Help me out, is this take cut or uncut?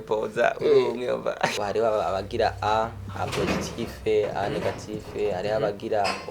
cut